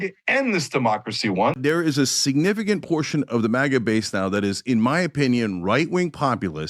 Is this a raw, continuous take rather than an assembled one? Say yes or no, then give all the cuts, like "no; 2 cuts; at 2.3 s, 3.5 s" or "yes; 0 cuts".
no; 1 cut; at 1.6 s